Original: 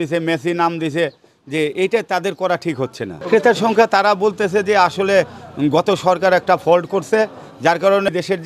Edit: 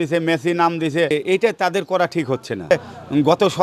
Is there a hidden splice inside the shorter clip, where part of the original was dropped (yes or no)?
yes